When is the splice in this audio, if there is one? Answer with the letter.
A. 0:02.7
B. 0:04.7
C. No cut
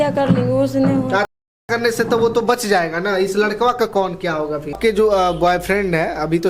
B